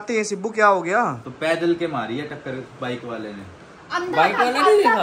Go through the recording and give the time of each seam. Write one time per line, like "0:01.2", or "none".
0:01.3